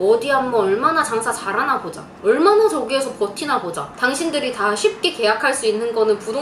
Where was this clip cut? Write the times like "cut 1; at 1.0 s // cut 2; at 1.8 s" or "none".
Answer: cut 1; at 3.9 s